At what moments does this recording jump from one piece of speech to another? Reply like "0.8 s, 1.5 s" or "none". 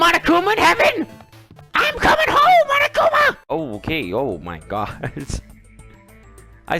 3.4 s